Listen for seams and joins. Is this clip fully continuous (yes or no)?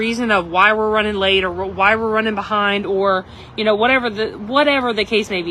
yes